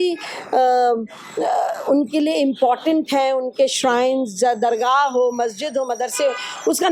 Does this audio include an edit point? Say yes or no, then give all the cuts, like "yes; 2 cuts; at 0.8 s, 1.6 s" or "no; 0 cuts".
no; 0 cuts